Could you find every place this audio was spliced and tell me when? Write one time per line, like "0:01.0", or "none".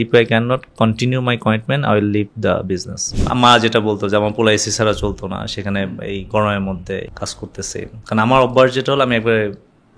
0:03.1
0:07.1